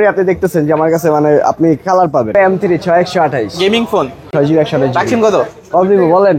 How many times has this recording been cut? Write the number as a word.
two